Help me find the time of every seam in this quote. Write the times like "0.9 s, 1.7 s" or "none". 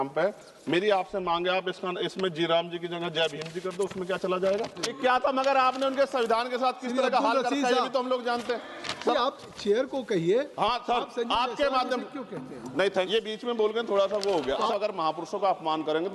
4.9 s, 9.1 s, 13.1 s, 14.7 s